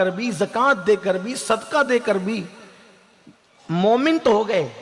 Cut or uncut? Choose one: uncut